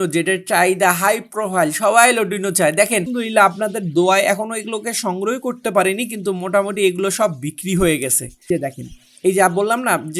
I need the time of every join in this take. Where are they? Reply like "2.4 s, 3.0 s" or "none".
3.1 s, 8.5 s